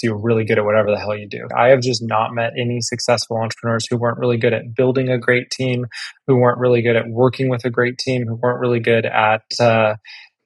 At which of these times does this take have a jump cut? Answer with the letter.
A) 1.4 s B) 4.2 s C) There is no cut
A